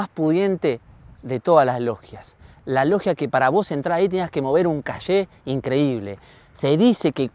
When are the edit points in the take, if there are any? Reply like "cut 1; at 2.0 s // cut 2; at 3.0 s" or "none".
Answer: none